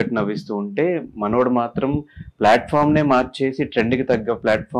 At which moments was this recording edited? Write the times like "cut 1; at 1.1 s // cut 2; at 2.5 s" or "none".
none